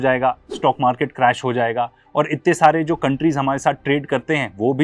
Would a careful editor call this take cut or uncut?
uncut